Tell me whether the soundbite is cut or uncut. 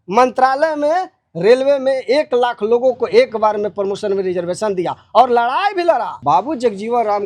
cut